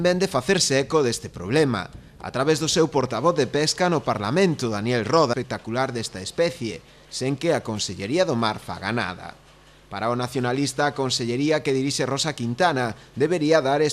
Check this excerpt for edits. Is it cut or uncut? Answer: cut